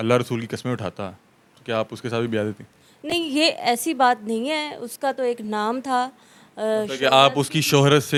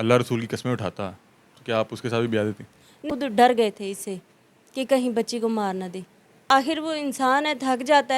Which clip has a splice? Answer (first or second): second